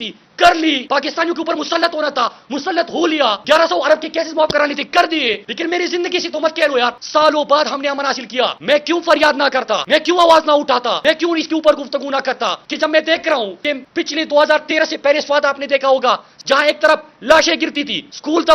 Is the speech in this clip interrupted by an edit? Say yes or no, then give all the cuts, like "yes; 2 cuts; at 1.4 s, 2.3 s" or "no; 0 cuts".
yes; 2 cuts; at 7.0 s, 16.3 s